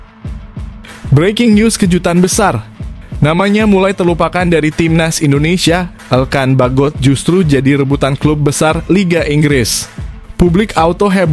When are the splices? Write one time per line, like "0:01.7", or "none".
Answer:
0:01.1

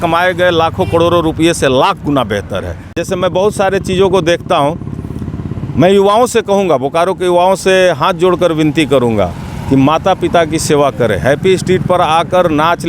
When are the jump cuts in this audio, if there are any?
0:02.9

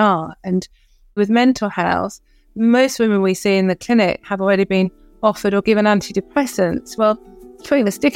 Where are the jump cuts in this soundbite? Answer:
0:01.2

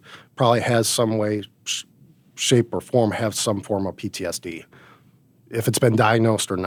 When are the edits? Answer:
none

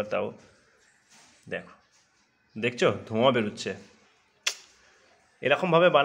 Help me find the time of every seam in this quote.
none

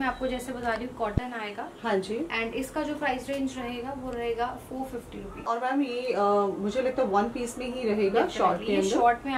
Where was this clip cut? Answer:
0:05.4

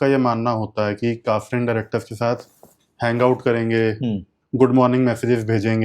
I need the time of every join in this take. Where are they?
0:04.4

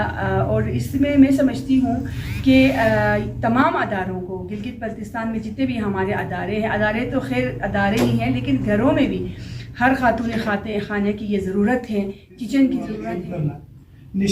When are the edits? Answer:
0:12.9

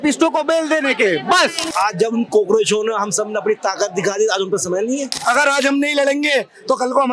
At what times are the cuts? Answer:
0:01.7
0:05.2

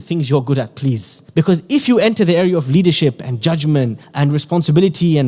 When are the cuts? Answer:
0:01.1
0:04.0

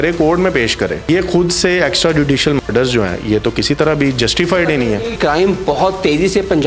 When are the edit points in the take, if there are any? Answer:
0:01.0
0:05.1

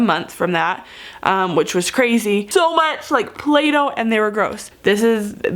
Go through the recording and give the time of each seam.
0:02.5
0:04.6

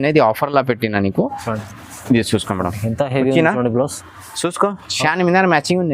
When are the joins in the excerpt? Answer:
0:01.7

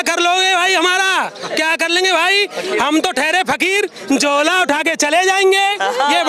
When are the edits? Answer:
none

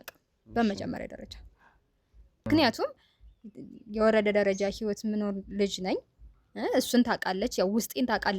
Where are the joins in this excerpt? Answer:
0:02.5

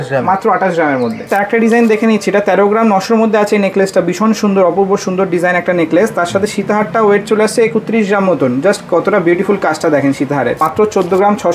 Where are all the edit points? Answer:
0:01.3
0:10.6

